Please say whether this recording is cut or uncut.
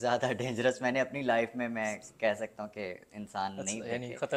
uncut